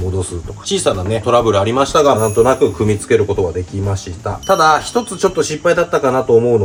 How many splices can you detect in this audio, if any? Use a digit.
0